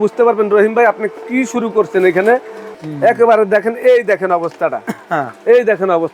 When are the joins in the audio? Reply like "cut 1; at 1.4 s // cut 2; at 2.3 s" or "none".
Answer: cut 1; at 2.7 s